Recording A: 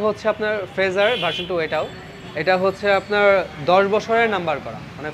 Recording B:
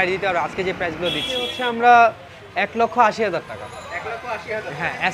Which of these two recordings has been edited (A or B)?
B